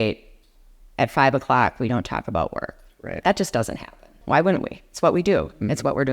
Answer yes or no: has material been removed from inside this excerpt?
yes